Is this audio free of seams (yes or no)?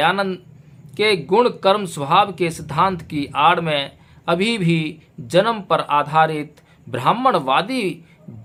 yes